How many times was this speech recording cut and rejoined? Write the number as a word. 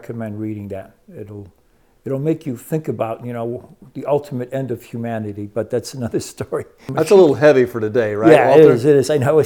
one